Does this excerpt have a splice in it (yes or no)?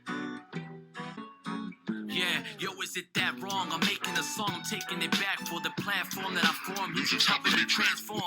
yes